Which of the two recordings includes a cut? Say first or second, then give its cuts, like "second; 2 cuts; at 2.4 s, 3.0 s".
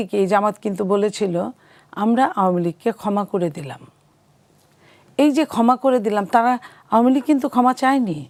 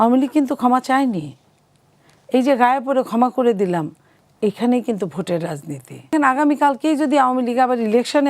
second; 1 cut; at 6.1 s